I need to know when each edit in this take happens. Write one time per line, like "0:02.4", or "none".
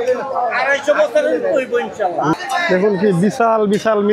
0:02.4